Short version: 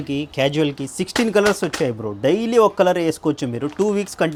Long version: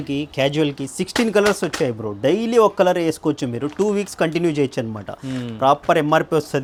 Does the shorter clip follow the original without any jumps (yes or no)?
yes